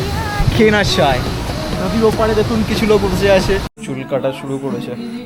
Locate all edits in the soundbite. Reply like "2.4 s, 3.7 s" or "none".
3.8 s